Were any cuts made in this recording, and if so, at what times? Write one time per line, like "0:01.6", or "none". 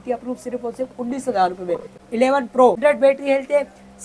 0:02.0
0:02.8